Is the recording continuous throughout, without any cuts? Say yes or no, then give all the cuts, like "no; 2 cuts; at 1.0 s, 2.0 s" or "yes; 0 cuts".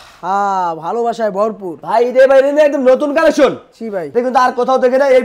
no; 1 cut; at 1.7 s